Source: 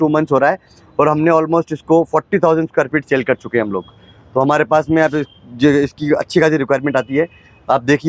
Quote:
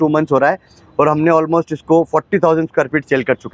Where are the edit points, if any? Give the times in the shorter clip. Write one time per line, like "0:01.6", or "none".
none